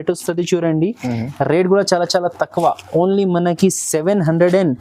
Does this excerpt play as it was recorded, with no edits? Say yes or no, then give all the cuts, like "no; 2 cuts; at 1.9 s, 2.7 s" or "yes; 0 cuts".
yes; 0 cuts